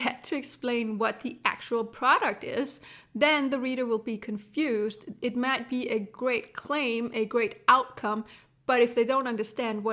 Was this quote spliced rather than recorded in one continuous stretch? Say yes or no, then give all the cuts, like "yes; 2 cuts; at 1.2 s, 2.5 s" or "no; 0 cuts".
no; 0 cuts